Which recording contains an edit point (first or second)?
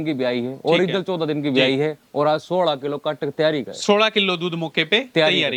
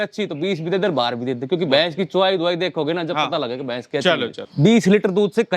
second